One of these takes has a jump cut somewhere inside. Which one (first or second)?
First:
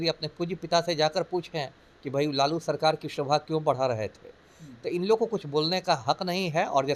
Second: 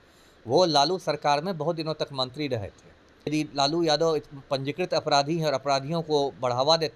second